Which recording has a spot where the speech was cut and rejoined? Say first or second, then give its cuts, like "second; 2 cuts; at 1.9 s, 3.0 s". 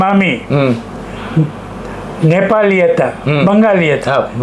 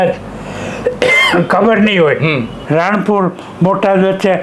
second; 1 cut; at 2.6 s